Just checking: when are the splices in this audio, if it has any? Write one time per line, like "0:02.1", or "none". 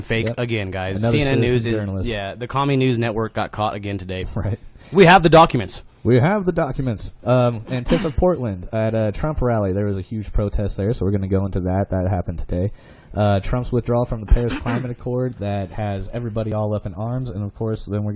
0:12.0